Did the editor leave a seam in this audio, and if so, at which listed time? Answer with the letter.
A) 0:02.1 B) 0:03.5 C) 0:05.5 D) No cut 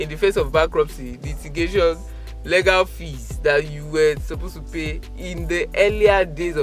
D